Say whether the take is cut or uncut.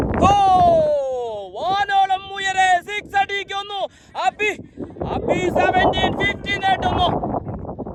uncut